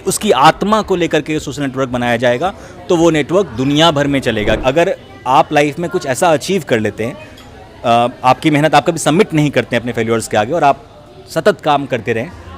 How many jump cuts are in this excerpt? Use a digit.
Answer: 1